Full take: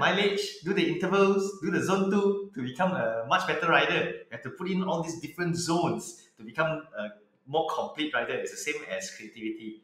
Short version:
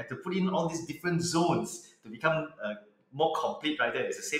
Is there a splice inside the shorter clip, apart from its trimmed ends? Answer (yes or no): no